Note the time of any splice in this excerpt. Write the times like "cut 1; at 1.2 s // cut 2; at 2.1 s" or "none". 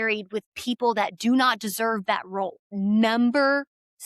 cut 1; at 2.6 s